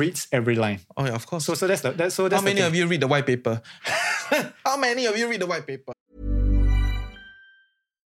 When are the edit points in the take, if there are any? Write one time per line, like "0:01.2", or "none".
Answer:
0:05.9